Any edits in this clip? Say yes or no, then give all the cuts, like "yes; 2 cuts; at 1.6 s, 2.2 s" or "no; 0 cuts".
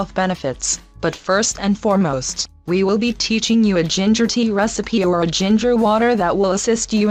no; 0 cuts